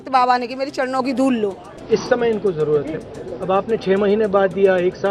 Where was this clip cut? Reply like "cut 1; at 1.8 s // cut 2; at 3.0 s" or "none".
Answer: cut 1; at 1.7 s